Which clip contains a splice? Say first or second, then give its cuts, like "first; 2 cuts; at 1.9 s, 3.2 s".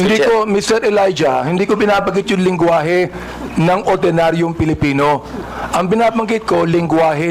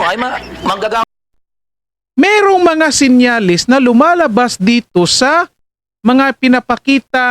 second; 1 cut; at 1.0 s